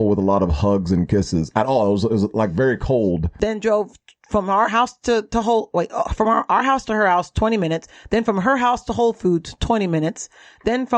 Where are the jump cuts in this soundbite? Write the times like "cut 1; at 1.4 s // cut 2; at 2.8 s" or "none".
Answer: cut 1; at 3.3 s